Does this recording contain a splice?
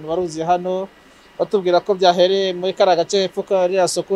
no; 0 cuts

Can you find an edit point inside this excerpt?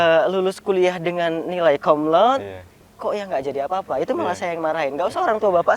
no; 0 cuts

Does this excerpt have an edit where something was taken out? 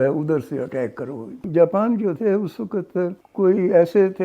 yes; 2 cuts; at 1.4 s, 3.2 s

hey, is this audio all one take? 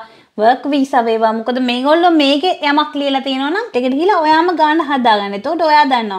no; 1 cut; at 3.7 s

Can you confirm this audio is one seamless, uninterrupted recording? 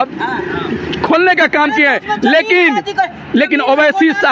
yes; 0 cuts

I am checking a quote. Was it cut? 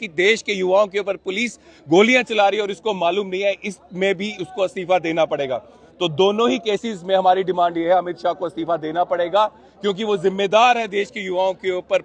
no; 0 cuts

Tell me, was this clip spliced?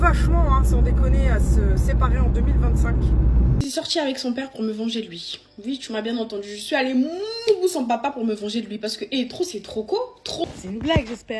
yes; 2 cuts; at 3.6 s, 10.4 s

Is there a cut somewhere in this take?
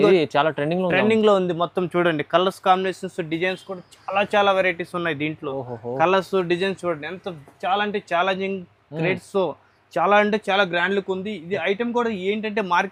no; 0 cuts

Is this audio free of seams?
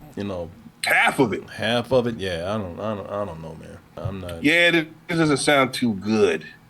no; 1 cut; at 3.9 s

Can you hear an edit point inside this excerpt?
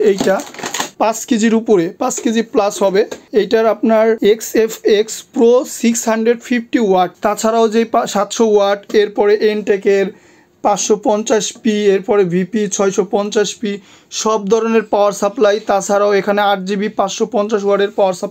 yes; 2 cuts; at 0.9 s, 7.1 s

